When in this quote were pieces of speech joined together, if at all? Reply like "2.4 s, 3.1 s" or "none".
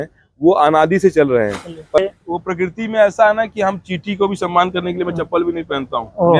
2.0 s